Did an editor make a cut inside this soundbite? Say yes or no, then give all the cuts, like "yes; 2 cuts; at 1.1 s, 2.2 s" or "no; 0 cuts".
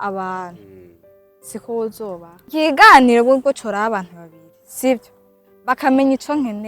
yes; 1 cut; at 2.3 s